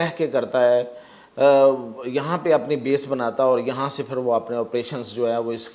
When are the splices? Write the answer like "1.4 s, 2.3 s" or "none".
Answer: none